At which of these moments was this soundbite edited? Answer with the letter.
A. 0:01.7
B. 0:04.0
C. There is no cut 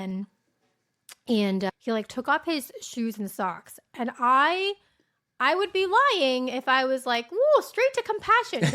A